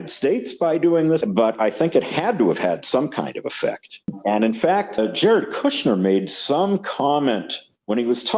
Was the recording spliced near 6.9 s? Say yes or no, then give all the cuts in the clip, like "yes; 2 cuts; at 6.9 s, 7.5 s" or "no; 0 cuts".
no; 3 cuts; at 1.2 s, 4.1 s, 5.0 s